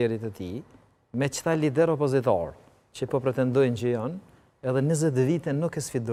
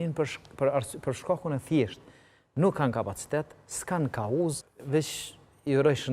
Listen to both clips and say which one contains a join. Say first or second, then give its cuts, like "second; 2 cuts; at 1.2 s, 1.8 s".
second; 1 cut; at 4.7 s